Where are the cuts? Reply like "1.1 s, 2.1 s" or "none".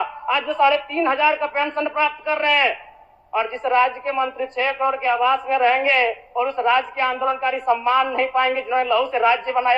none